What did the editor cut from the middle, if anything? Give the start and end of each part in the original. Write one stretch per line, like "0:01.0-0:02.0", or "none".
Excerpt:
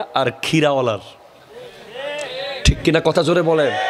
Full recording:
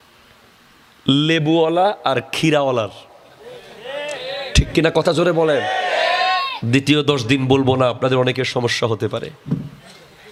none